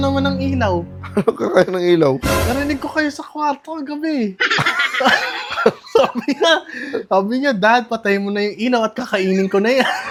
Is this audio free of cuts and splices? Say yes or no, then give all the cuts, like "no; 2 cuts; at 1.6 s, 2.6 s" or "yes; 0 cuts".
yes; 0 cuts